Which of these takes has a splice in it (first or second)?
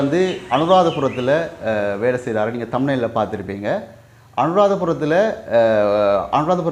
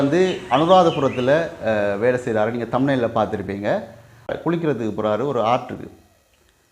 second